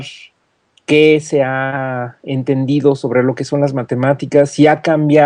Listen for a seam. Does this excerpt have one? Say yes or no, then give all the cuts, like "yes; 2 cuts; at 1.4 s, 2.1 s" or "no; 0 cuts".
yes; 1 cut; at 3.5 s